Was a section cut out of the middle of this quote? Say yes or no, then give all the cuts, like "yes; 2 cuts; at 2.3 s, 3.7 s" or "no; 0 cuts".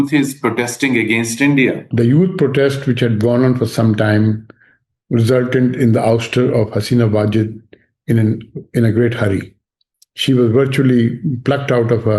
yes; 1 cut; at 1.8 s